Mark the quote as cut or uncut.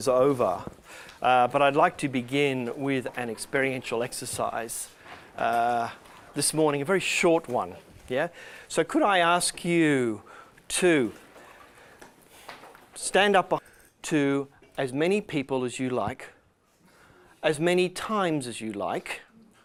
uncut